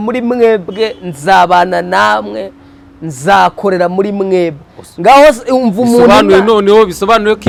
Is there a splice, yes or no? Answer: no